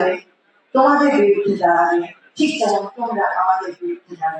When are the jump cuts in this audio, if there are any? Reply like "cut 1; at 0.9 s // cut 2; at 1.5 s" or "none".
none